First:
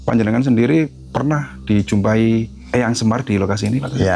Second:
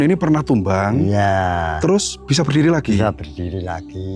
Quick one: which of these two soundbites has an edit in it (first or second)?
first